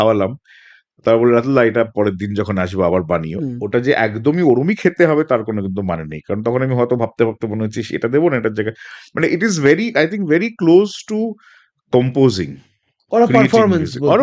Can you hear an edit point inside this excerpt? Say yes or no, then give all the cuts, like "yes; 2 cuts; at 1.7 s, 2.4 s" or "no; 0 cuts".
no; 0 cuts